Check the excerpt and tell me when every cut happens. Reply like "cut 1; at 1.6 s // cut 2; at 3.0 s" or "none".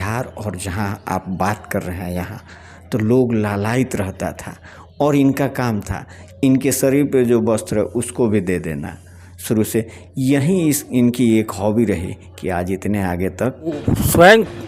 cut 1; at 13.8 s